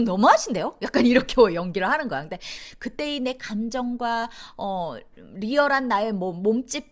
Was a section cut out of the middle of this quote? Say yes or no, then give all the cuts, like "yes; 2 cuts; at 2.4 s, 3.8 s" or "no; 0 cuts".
yes; 1 cut; at 2.5 s